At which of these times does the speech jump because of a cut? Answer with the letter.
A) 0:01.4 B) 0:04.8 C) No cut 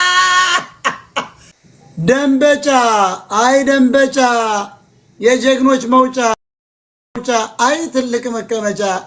A